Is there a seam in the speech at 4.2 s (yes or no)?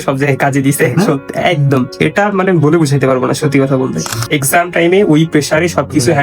yes